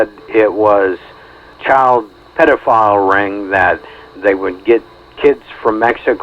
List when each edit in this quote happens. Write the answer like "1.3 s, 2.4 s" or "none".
1.5 s, 2.2 s